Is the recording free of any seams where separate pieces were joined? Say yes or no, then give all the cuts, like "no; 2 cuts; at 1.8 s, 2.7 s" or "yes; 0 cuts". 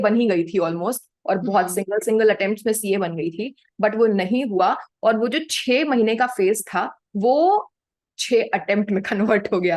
yes; 0 cuts